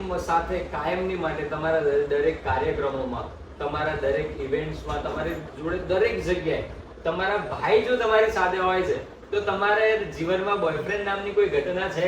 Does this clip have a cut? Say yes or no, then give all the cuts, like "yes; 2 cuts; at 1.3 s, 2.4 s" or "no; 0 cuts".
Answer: no; 0 cuts